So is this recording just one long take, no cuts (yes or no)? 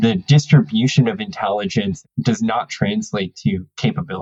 yes